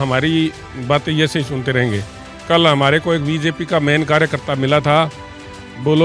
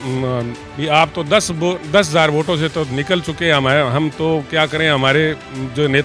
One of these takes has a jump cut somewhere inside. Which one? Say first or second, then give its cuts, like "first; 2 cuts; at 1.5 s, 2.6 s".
first; 1 cut; at 2.2 s